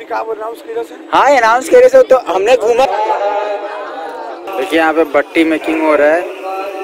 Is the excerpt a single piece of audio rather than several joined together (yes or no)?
no